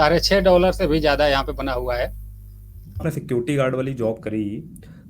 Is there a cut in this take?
yes; 1 cut; at 3.1 s

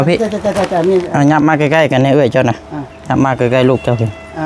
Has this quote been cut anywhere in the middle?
no; 0 cuts

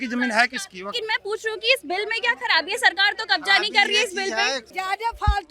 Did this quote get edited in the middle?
yes; 2 cuts; at 0.9 s, 4.7 s

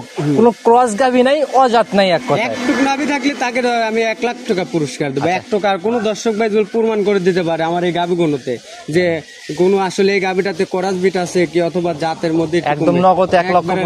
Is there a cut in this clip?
no; 0 cuts

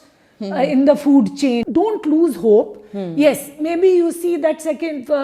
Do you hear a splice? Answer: yes; 1 cut; at 1.6 s

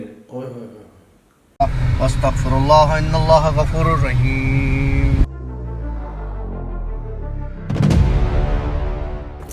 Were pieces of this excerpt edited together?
yes; 1 cut; at 1.4 s

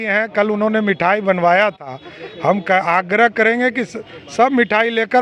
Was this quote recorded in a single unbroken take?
yes; 0 cuts

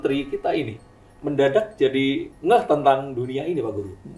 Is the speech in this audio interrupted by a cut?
no; 0 cuts

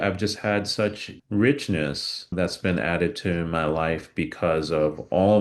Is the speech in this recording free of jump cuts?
no; 2 cuts; at 1.1 s, 2.3 s

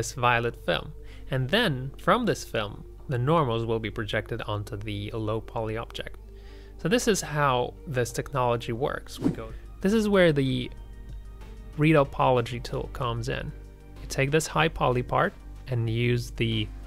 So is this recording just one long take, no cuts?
no; 1 cut; at 9.2 s

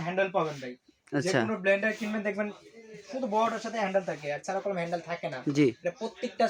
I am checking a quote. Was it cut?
no; 0 cuts

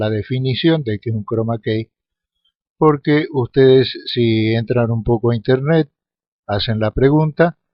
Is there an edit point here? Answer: no; 0 cuts

